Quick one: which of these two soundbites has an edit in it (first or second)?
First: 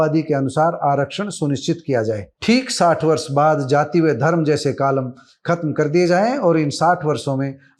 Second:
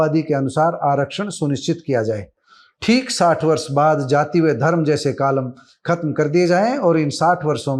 first